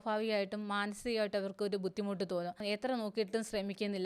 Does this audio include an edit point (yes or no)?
yes